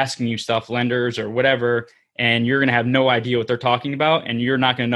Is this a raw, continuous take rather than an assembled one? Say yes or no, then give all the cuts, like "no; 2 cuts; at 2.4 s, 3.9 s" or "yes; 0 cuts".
yes; 0 cuts